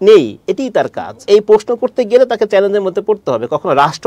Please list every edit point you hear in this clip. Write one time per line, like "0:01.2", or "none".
0:01.2